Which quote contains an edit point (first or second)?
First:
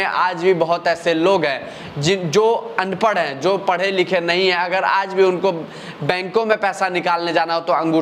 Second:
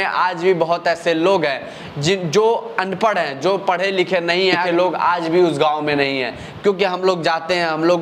second